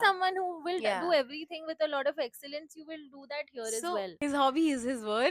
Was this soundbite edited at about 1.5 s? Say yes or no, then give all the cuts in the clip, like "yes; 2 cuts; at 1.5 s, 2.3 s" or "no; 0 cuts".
no; 1 cut; at 4.1 s